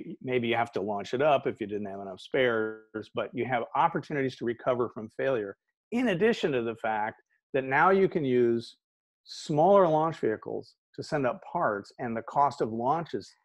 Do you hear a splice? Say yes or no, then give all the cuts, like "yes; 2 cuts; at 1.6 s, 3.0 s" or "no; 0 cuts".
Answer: no; 0 cuts